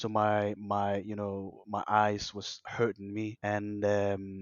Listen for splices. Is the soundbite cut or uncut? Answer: cut